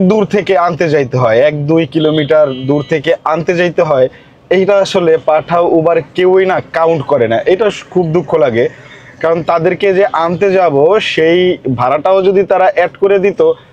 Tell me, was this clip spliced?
no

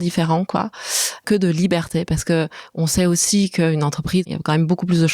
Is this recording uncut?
no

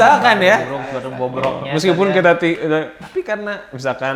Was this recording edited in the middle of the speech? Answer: no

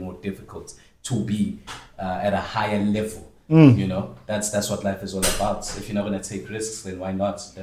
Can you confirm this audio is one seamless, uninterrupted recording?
yes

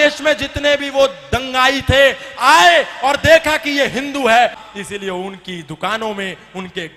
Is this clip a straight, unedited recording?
no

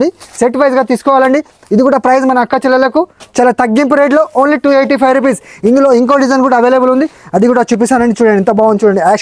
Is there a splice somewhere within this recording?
no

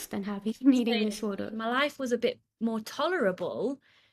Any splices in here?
yes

